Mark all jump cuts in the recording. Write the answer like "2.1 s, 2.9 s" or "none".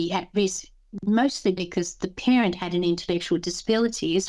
none